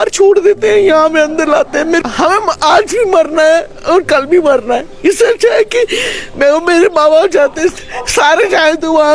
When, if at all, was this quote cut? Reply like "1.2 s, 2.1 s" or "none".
2.0 s